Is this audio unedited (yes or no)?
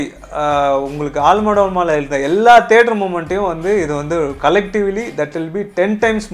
yes